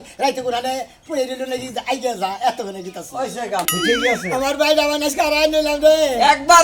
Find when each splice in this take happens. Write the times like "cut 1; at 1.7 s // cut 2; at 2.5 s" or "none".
cut 1; at 3.7 s